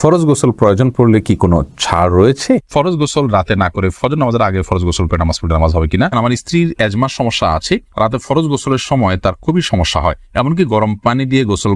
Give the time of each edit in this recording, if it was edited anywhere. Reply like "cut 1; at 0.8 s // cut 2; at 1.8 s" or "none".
cut 1; at 2.7 s // cut 2; at 6.1 s